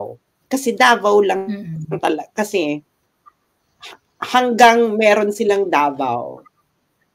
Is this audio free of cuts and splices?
yes; 0 cuts

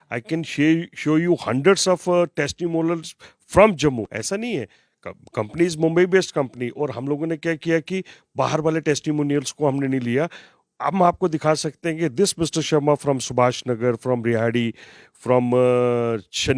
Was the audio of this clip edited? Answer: no; 0 cuts

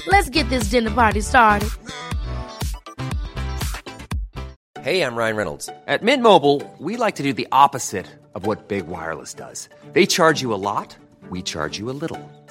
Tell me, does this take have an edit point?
yes; 1 cut; at 4.6 s

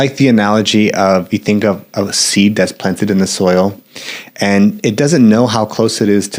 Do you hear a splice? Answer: no; 0 cuts

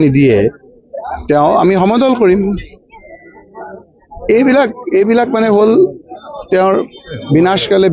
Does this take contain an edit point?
no; 0 cuts

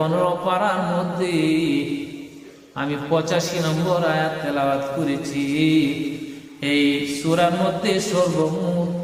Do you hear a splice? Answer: no; 0 cuts

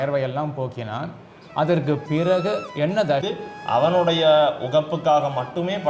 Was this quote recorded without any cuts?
no; 1 cut; at 3.2 s

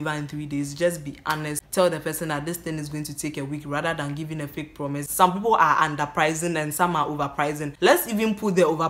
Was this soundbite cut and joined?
yes; 3 cuts; at 1.6 s, 5.1 s, 7.7 s

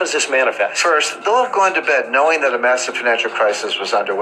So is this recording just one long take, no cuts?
no; 1 cut; at 1.1 s

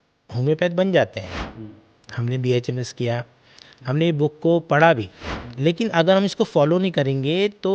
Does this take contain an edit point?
no; 0 cuts

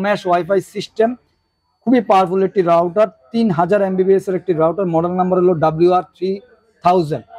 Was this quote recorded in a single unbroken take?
yes; 0 cuts

